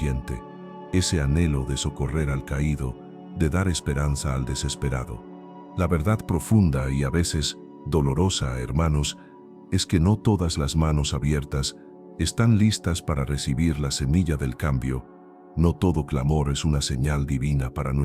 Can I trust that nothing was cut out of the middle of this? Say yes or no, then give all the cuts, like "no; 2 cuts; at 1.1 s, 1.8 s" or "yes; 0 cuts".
no; 1 cut; at 5.5 s